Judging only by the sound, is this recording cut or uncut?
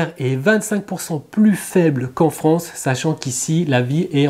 uncut